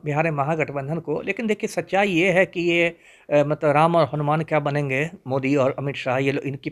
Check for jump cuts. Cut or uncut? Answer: uncut